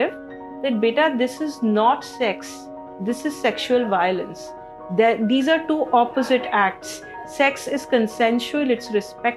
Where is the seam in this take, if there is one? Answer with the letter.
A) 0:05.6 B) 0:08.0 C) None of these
C